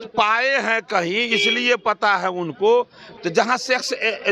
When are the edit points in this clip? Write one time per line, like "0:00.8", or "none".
0:03.0

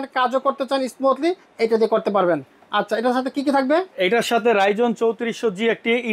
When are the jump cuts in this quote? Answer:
none

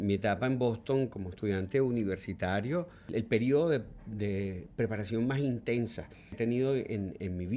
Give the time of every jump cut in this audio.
0:03.0
0:06.4

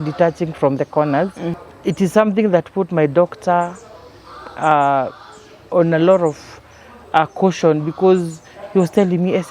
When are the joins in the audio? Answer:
0:01.5

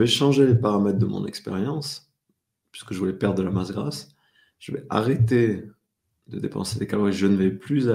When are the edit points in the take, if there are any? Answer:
none

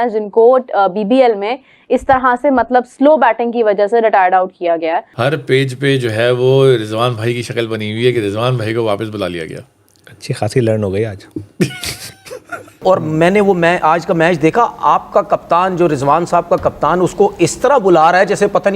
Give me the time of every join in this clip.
0:05.1
0:12.8

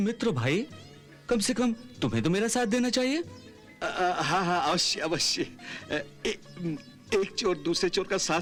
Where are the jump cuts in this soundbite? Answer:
none

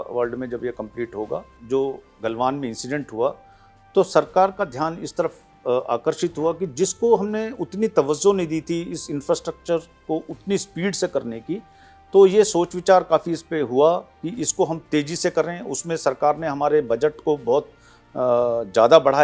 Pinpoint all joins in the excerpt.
0:01.5

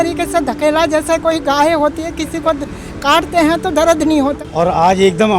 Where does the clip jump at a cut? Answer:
0:04.4

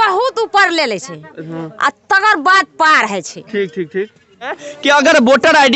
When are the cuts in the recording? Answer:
0:04.7

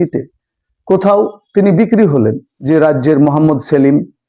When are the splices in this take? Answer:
0:02.5

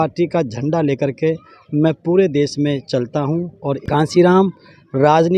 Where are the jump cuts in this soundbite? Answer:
0:03.8

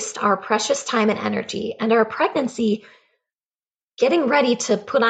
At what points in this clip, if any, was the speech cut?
none

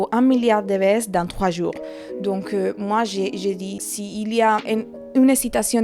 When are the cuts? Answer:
0:03.8
0:04.6

